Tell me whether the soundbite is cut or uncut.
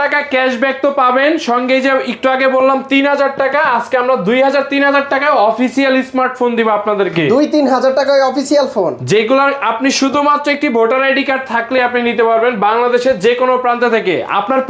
uncut